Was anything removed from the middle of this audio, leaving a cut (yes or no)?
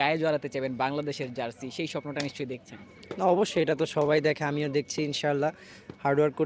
no